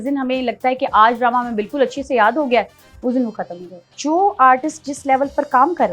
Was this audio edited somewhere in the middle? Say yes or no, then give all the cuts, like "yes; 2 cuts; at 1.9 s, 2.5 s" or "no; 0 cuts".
yes; 1 cut; at 3.9 s